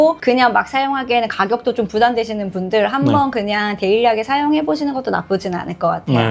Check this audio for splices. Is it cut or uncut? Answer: uncut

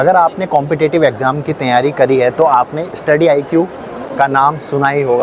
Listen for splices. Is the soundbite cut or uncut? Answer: uncut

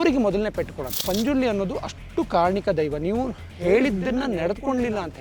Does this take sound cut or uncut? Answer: cut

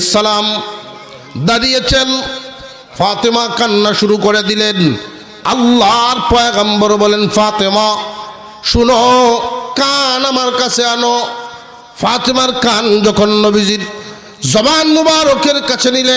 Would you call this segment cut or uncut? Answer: uncut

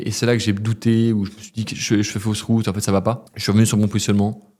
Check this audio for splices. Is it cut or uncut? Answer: cut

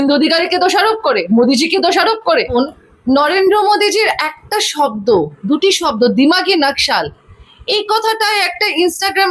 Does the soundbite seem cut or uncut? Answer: cut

